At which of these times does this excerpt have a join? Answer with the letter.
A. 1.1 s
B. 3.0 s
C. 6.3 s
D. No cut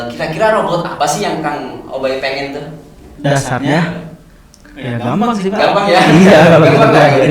B